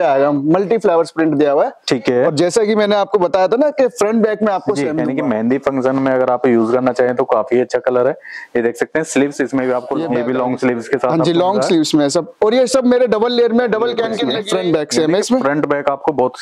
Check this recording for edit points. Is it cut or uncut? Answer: cut